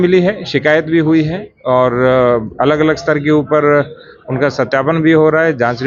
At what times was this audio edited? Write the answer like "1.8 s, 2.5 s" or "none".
none